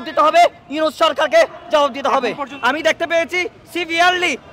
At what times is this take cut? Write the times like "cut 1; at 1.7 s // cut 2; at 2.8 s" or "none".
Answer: cut 1; at 2.5 s